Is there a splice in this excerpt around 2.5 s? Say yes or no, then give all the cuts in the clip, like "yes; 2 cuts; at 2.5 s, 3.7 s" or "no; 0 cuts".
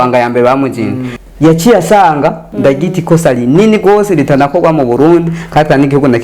yes; 2 cuts; at 1.1 s, 2.5 s